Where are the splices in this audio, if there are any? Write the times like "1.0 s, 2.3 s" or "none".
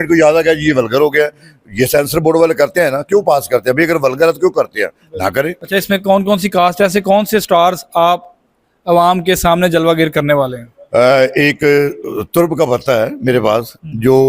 none